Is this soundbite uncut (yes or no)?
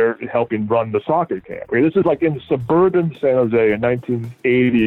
yes